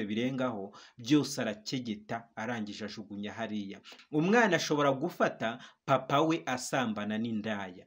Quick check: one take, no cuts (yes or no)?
no